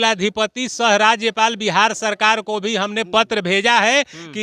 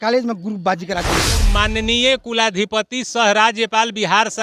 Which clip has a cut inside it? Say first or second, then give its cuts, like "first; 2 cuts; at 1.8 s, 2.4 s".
second; 1 cut; at 1.4 s